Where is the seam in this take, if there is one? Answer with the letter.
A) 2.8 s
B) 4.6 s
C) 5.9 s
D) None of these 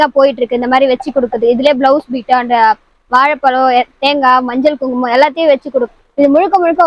C